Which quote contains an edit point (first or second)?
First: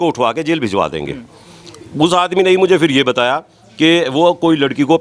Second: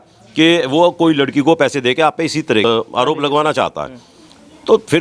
second